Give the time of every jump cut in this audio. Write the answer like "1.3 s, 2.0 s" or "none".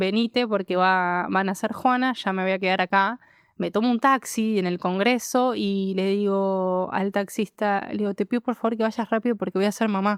none